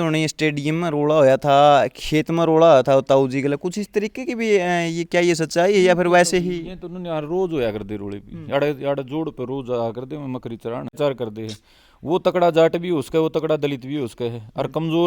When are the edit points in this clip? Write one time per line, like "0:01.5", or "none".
0:10.9